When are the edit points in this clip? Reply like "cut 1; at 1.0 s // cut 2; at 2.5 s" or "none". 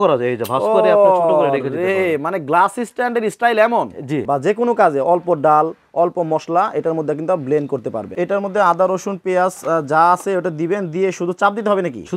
cut 1; at 4.2 s // cut 2; at 8.1 s